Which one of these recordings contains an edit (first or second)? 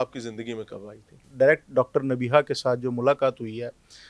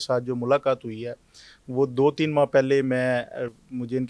first